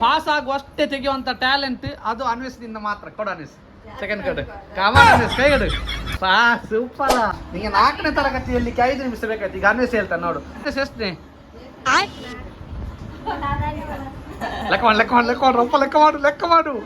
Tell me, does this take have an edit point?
yes; 2 cuts; at 7.5 s, 10.6 s

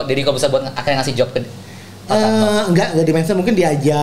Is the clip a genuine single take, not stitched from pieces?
yes; 0 cuts

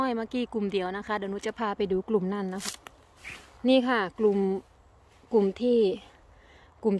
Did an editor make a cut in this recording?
yes; 1 cut; at 2.6 s

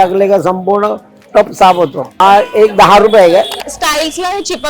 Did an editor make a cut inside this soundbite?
yes; 2 cuts; at 2.2 s, 3.5 s

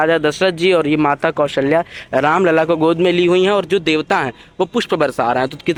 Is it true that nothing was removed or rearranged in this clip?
yes; 0 cuts

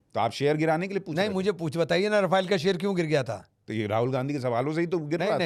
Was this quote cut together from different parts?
no; 0 cuts

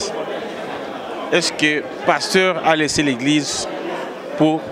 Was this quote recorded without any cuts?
yes; 0 cuts

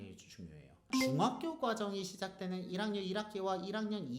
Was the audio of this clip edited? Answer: yes; 1 cut; at 1.0 s

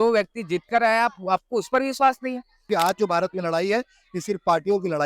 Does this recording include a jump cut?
yes; 1 cut; at 2.7 s

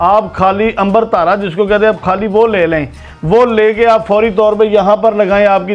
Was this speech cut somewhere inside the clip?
no; 0 cuts

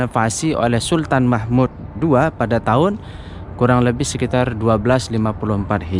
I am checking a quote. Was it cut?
no; 0 cuts

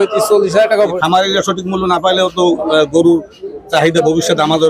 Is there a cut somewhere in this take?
yes; 1 cut; at 0.9 s

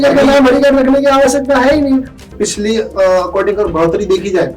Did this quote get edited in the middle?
yes; 1 cut; at 2.1 s

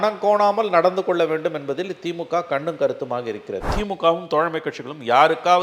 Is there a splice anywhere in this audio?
yes; 1 cut; at 3.7 s

